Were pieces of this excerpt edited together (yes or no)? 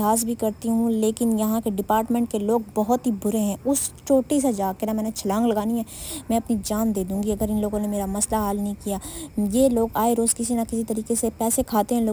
no